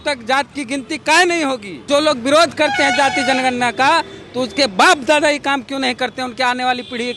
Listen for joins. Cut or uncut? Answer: cut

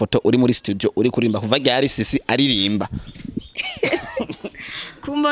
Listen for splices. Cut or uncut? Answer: uncut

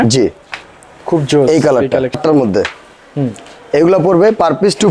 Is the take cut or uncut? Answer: cut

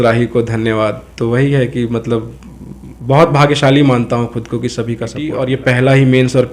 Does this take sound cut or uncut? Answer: cut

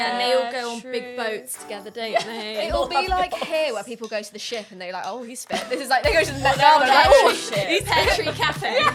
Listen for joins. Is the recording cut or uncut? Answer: uncut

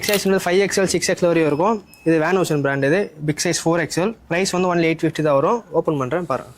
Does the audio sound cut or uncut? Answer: cut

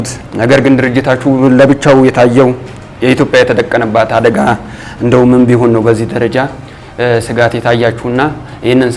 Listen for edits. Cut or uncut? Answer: uncut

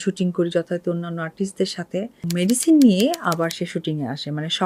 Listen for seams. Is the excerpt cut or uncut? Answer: cut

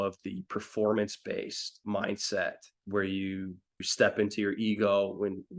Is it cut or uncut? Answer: cut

